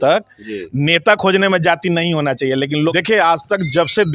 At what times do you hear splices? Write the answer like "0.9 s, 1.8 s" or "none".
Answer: 2.9 s